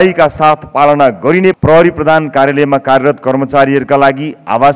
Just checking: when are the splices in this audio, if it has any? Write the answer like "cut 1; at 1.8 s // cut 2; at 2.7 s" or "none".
cut 1; at 1.6 s